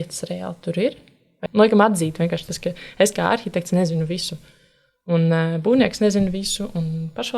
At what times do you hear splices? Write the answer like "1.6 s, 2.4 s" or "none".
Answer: 1.4 s